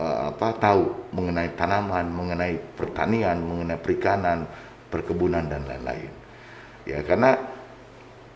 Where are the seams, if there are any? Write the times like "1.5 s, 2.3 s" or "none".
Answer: none